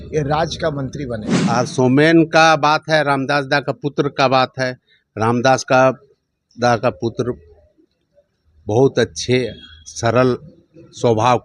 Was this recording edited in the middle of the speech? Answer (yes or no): yes